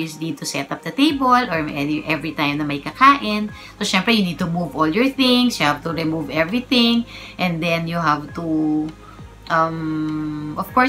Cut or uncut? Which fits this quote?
uncut